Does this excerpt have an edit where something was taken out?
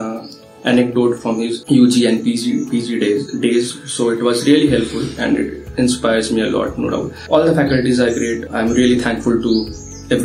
yes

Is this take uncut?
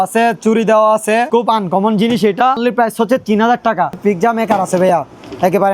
no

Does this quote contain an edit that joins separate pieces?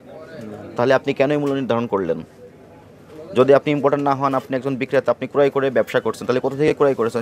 no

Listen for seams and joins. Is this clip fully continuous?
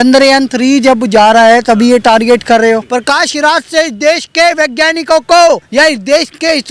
no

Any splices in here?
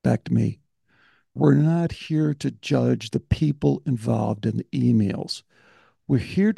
yes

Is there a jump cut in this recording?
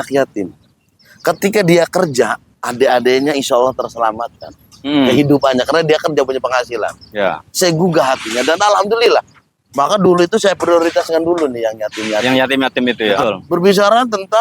yes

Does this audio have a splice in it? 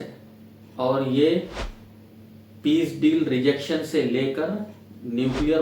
no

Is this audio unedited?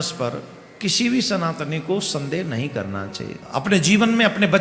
no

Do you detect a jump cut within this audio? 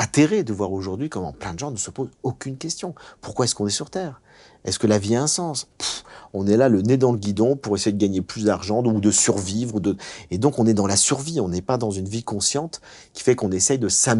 no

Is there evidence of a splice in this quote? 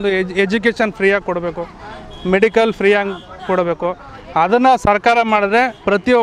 no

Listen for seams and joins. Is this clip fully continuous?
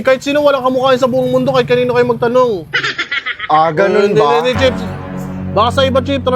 yes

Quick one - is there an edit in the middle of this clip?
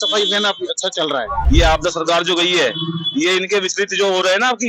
yes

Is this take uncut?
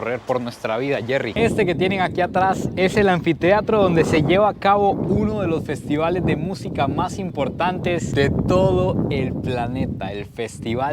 no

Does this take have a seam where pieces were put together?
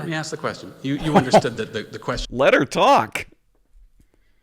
yes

